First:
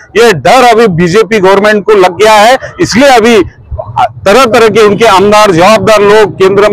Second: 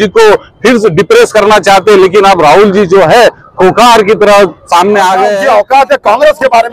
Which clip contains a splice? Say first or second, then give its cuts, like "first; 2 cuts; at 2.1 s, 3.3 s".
second; 1 cut; at 5.3 s